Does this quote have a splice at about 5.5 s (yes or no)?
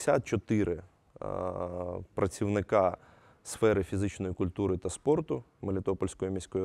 no